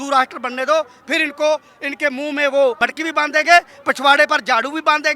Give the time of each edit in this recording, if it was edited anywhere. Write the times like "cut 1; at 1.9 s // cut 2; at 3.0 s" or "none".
cut 1; at 2.8 s